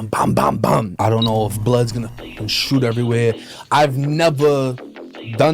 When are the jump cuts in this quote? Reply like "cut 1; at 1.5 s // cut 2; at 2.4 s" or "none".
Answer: cut 1; at 0.9 s